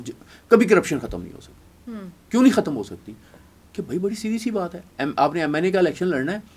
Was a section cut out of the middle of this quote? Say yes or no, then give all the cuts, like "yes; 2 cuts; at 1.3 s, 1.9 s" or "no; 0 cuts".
no; 0 cuts